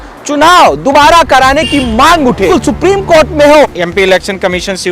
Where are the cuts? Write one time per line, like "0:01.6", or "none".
0:02.5
0:03.7